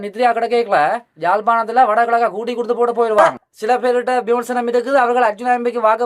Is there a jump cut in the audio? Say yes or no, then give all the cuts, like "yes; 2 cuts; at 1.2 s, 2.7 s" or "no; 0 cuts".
yes; 1 cut; at 3.2 s